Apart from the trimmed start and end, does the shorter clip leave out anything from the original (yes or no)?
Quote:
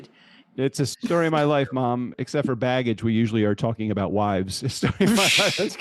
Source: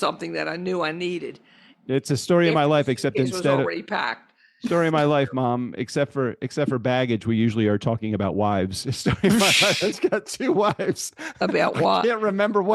yes